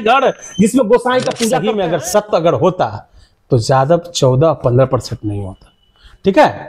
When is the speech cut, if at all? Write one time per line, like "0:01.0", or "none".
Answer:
0:01.5